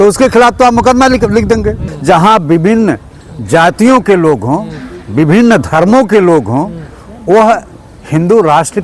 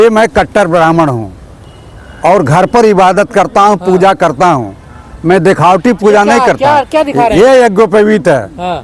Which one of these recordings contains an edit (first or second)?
first